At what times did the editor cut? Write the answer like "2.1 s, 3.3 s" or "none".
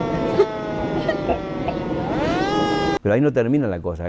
3.0 s